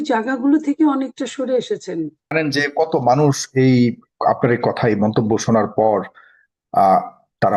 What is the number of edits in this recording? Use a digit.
1